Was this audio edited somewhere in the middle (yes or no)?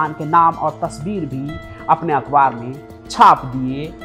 no